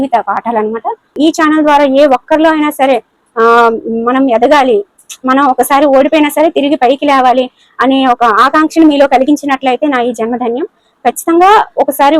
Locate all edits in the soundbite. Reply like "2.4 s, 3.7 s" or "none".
1.2 s